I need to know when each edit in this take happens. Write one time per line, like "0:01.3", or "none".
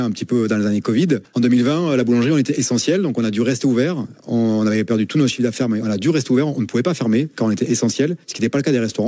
0:01.3